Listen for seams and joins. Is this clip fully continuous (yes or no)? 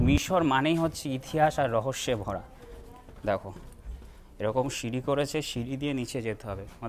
yes